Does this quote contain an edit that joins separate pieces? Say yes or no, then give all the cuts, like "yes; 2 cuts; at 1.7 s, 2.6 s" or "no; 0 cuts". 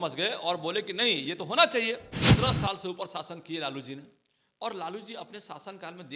yes; 1 cut; at 2.2 s